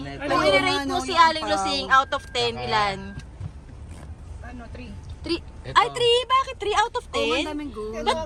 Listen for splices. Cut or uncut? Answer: uncut